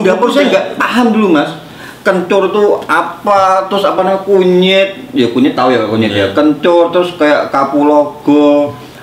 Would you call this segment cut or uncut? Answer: uncut